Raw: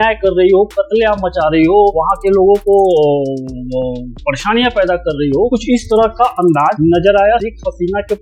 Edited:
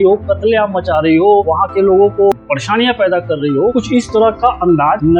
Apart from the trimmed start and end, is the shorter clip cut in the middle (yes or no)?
yes